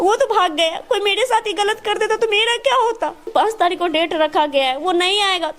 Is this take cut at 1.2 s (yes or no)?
no